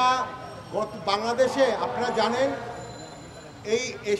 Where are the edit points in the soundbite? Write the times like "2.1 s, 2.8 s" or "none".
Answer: none